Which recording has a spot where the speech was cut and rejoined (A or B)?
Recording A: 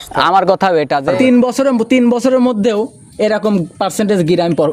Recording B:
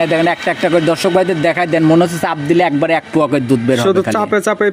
A